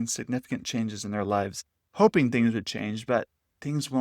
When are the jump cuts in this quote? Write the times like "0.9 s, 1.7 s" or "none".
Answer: 1.8 s